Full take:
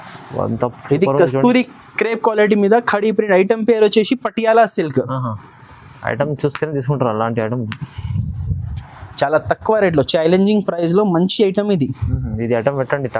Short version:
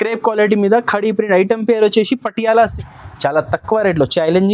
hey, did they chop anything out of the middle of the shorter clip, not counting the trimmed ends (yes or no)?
yes